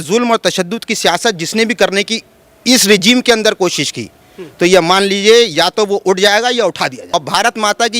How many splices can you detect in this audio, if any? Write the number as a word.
one